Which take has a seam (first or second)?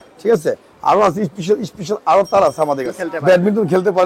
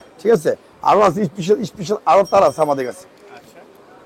first